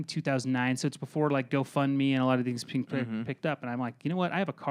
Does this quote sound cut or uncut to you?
uncut